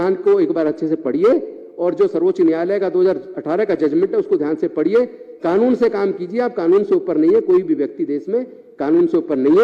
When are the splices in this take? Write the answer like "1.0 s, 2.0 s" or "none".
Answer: none